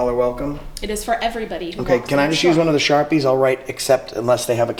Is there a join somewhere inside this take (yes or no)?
no